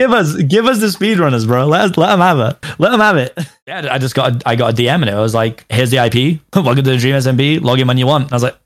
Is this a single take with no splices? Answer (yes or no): no